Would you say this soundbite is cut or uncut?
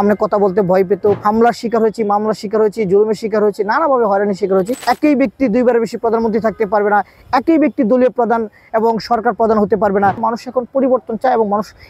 cut